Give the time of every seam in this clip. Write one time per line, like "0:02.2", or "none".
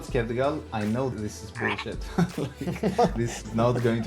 0:01.1
0:03.1